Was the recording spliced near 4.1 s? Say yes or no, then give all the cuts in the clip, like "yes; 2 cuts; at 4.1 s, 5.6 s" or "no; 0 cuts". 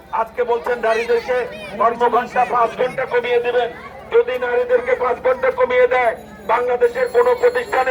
no; 0 cuts